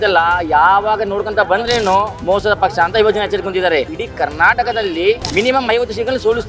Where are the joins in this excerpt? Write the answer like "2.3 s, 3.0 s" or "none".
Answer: 2.1 s, 4.0 s, 5.2 s